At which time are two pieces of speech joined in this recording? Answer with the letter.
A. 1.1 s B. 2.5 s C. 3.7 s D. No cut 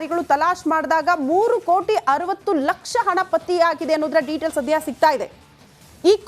D